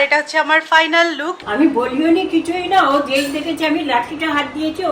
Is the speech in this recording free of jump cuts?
no; 1 cut; at 1.3 s

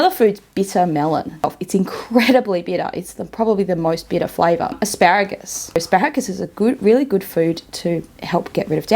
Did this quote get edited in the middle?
yes; 3 cuts; at 1.5 s, 4.8 s, 5.8 s

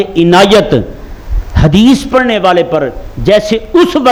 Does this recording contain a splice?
no; 0 cuts

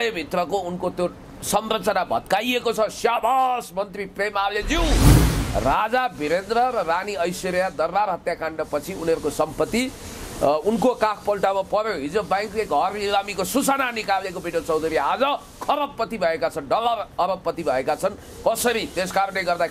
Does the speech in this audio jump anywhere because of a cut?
yes; 1 cut; at 5.2 s

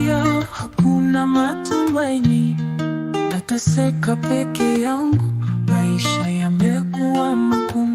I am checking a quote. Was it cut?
no; 0 cuts

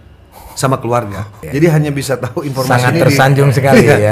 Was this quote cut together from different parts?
yes; 1 cut; at 1.4 s

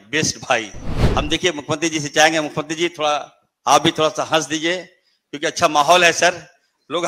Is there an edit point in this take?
yes; 1 cut; at 0.9 s

